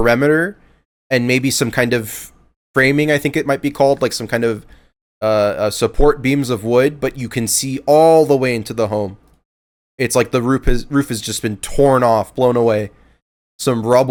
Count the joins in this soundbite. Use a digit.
0